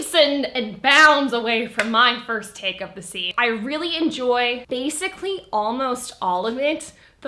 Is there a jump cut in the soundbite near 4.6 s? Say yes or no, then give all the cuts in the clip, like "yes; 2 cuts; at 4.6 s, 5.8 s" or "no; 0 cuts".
yes; 2 cuts; at 3.3 s, 4.6 s